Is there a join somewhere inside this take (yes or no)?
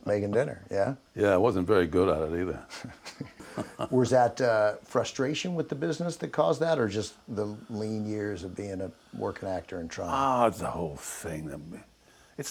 no